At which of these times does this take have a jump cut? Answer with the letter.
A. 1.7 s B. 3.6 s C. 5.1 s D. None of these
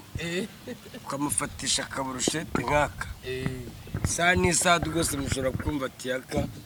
D